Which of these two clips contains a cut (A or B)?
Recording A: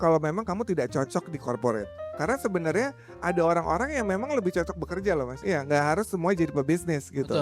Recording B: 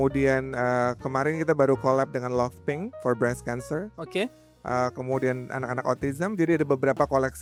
A